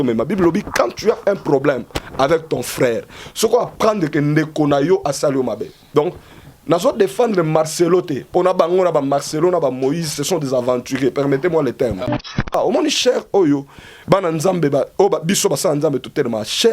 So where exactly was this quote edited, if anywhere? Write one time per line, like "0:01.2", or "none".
0:12.5